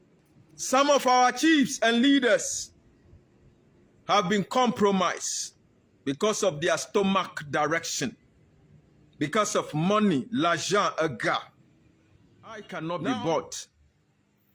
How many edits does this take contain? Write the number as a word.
one